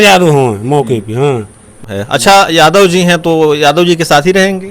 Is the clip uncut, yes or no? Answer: no